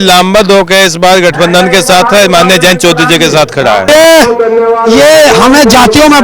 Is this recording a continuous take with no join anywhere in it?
no; 1 cut; at 3.9 s

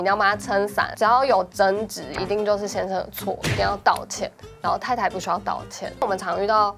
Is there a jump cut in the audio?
yes; 2 cuts; at 0.9 s, 6.0 s

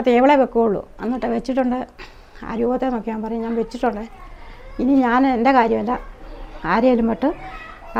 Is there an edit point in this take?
no; 0 cuts

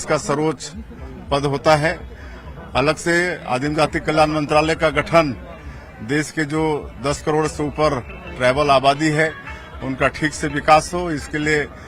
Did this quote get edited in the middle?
no; 0 cuts

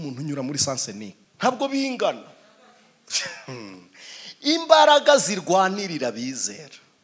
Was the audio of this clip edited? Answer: yes; 1 cut; at 1.2 s

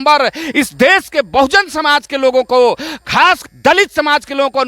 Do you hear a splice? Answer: yes; 1 cut; at 3.4 s

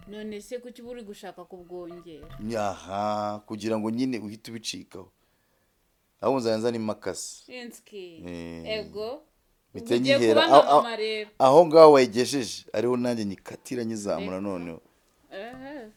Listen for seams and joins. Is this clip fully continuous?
yes; 0 cuts

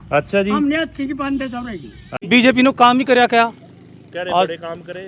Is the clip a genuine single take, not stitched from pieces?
no; 1 cut; at 2.1 s

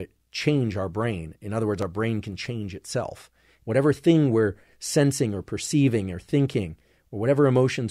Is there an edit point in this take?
yes; 1 cut; at 3.6 s

